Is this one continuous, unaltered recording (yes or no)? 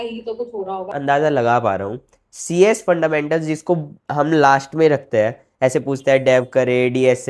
no